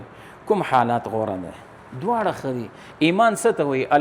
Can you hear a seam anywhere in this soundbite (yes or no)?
no